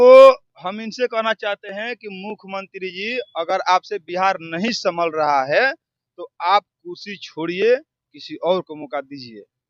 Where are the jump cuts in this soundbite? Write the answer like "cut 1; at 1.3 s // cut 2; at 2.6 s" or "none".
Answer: none